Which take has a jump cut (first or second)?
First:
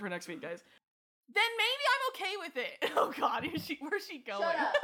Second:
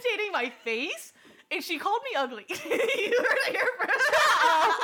first